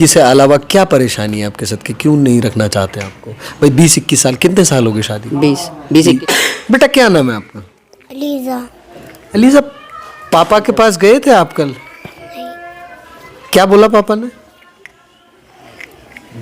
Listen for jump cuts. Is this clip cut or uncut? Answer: cut